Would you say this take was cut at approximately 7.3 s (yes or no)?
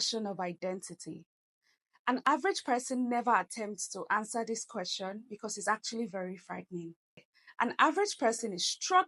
yes